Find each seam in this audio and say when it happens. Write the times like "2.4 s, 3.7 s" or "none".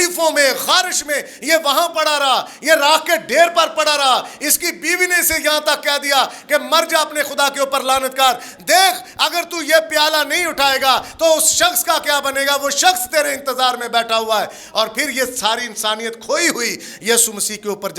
none